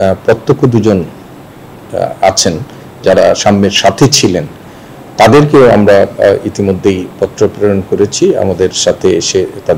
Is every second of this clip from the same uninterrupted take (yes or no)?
yes